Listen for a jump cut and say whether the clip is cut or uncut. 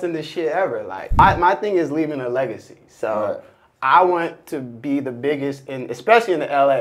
cut